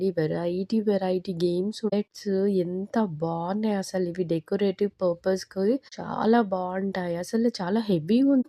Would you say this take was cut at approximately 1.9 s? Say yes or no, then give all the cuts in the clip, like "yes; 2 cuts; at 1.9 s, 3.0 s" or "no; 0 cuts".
yes; 1 cut; at 1.9 s